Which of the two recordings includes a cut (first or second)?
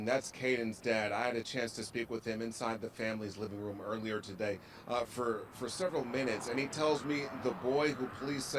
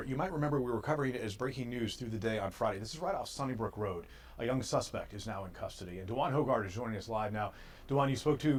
first